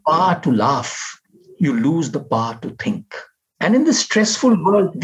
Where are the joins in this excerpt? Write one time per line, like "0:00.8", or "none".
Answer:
none